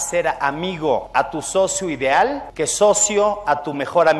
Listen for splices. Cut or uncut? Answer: cut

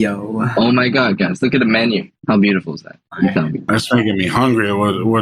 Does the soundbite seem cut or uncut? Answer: cut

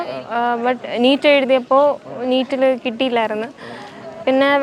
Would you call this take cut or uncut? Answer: uncut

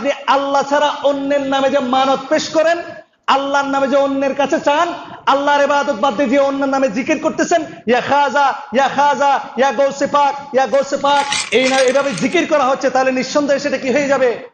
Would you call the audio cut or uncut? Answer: cut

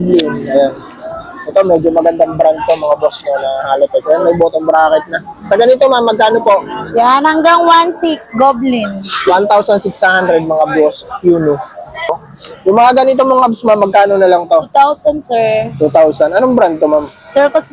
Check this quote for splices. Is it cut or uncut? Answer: cut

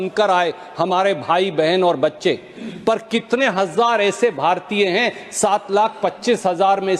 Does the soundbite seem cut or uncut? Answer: uncut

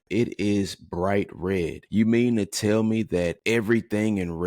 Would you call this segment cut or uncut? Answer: cut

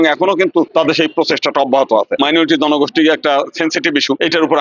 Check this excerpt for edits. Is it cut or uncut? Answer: cut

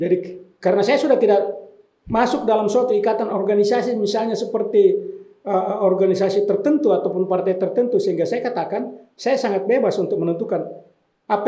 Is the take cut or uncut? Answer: uncut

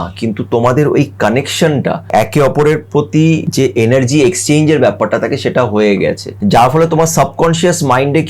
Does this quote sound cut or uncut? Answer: cut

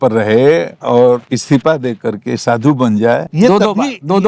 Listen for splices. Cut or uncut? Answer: cut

